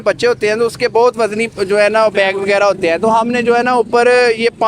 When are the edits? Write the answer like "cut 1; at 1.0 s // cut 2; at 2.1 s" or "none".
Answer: none

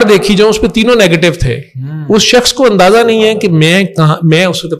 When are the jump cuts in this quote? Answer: none

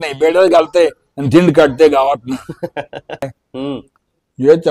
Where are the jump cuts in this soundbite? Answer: cut 1; at 3.3 s

